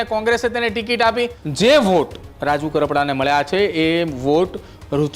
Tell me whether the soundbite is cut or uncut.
cut